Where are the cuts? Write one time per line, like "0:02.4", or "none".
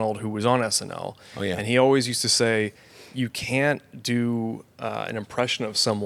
none